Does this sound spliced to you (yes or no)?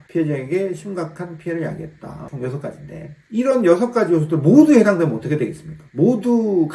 yes